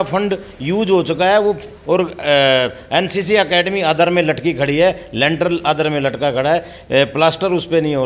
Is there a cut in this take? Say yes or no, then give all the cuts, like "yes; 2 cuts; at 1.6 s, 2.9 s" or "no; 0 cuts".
no; 0 cuts